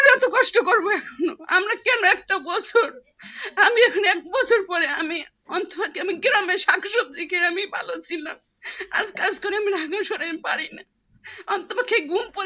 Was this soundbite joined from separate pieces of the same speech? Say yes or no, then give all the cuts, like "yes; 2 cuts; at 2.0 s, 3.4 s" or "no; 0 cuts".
no; 0 cuts